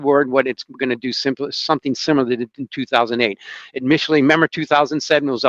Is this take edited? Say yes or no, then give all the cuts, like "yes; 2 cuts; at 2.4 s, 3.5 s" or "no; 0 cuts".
no; 0 cuts